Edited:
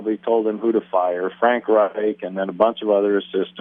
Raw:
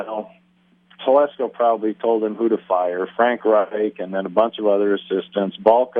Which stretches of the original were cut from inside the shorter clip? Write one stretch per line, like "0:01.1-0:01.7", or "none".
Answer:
none